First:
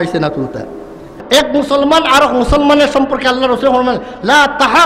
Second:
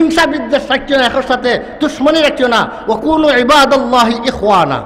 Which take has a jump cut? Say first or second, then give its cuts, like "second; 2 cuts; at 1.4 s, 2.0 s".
first; 1 cut; at 1.2 s